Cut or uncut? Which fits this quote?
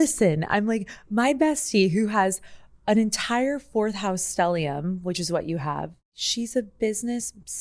cut